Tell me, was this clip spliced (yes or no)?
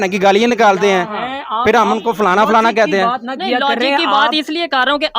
no